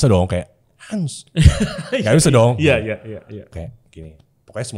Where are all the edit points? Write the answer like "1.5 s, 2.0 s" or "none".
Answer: 3.5 s